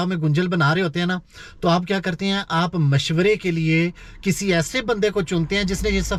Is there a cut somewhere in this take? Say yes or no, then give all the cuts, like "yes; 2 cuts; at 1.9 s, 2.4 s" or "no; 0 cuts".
no; 0 cuts